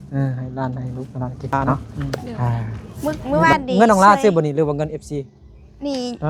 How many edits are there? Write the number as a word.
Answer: one